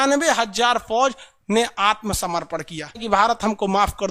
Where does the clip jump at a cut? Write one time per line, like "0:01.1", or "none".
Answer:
0:03.0